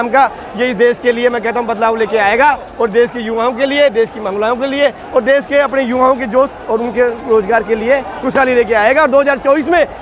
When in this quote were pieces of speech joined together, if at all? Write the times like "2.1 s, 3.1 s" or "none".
none